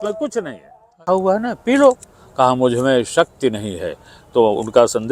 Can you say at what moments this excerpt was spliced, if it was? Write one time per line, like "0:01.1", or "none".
0:01.0